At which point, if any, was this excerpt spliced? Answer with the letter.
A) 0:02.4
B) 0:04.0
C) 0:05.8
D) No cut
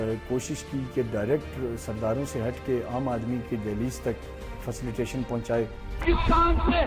C